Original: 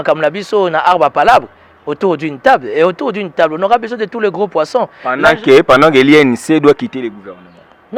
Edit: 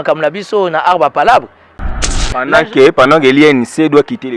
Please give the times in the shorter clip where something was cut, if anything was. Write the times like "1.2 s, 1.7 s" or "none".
2.1 s

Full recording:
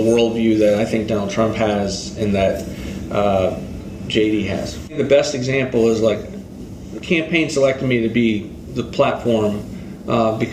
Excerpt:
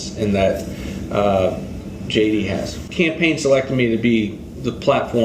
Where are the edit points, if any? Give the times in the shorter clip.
2.8 s

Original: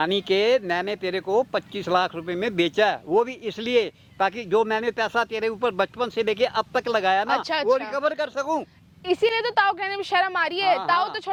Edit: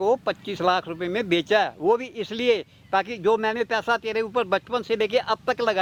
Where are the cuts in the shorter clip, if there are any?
none

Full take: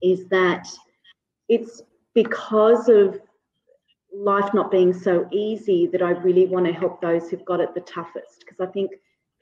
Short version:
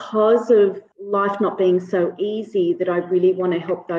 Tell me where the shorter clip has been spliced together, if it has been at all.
0.9 s

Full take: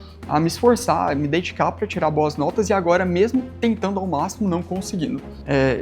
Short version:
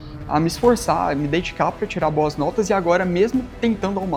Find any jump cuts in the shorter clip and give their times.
none

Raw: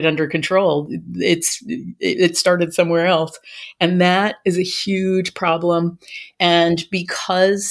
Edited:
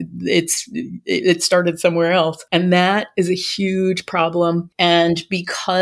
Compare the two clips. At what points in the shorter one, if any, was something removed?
2.4 s, 4.7 s

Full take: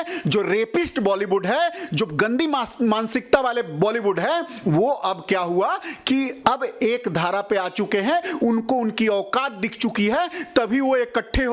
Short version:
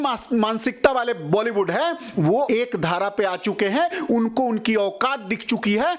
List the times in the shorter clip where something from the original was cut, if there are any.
2.5 s

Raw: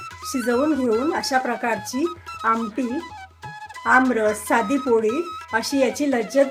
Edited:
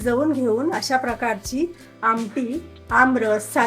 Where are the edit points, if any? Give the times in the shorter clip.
2.7 s

